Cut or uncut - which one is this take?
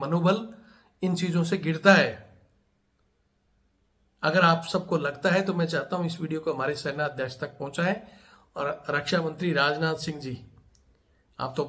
uncut